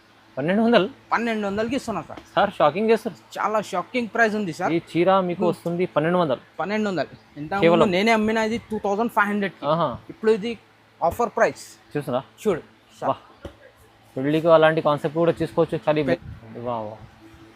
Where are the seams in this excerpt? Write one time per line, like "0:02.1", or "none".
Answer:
0:16.1